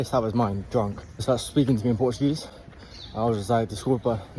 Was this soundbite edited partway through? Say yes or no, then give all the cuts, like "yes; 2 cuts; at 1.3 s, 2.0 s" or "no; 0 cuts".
yes; 1 cut; at 1.2 s